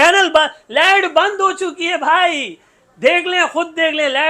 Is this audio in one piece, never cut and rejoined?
yes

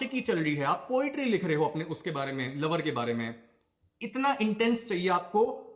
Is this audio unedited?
yes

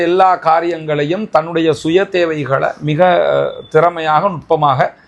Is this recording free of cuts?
yes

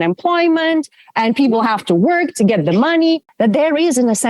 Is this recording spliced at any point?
yes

